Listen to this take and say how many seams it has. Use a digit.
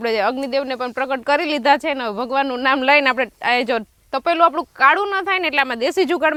0